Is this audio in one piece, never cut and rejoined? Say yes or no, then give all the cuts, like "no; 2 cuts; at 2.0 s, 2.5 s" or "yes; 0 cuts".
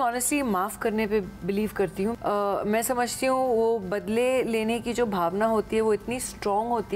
no; 1 cut; at 2.1 s